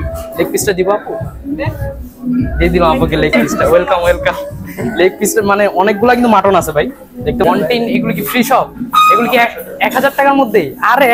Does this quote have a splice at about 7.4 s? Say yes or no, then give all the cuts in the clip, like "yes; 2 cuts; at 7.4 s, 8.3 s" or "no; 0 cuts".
yes; 1 cut; at 7.4 s